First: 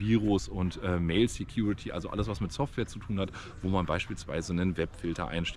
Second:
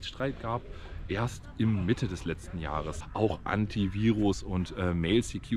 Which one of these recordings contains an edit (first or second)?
second